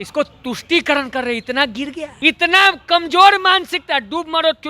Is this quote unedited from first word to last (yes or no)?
no